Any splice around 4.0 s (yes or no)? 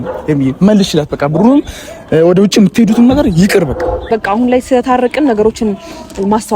yes